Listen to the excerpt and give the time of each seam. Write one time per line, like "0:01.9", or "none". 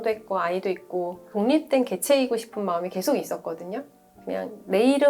0:01.3